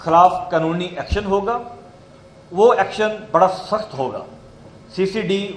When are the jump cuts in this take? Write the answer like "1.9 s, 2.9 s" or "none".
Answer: none